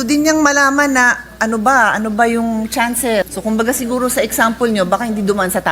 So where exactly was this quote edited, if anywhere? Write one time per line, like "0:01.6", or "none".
0:03.3

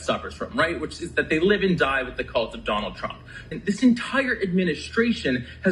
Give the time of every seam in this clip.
0:03.5

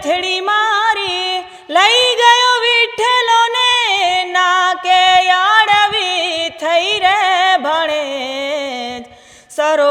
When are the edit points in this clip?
none

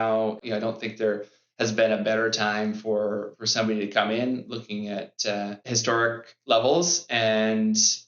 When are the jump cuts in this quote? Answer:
0:05.6

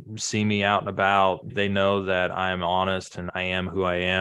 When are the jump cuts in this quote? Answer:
0:01.5
0:03.3

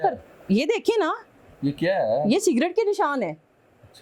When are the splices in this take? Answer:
none

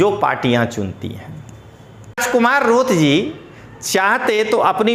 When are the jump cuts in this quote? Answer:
0:02.2

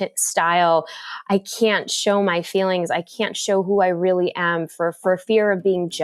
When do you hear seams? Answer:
none

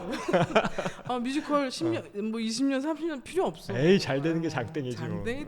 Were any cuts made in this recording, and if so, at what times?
none

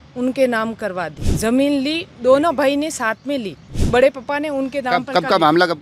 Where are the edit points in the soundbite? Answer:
0:01.2
0:03.8

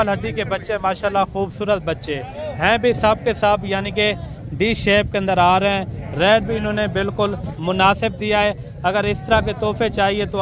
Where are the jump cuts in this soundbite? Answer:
none

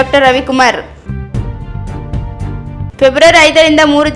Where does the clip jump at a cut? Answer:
0:01.0
0:02.9

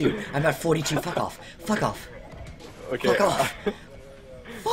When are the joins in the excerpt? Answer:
none

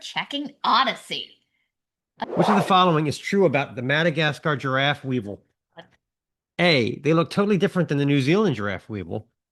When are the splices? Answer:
0:02.1

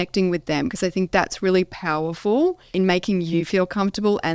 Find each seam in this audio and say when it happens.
0:02.7

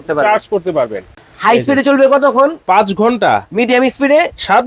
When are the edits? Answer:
0:01.1

